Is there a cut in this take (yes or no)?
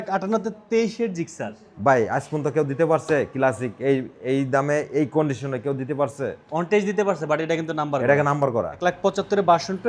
yes